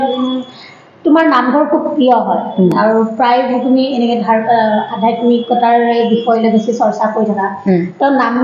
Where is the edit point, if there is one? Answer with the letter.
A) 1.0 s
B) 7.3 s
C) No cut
C